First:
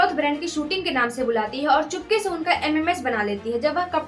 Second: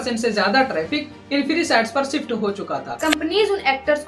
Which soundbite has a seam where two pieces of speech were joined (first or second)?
second